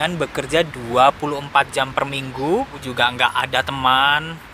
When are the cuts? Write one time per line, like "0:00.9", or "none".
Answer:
0:02.9